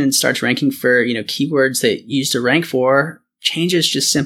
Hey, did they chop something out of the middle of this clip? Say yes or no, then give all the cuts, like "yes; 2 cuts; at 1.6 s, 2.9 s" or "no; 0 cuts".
no; 0 cuts